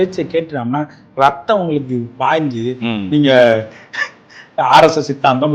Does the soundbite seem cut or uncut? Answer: cut